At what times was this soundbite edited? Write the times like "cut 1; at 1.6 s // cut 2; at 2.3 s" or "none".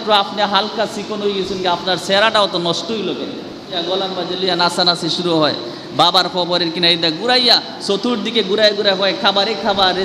cut 1; at 3.8 s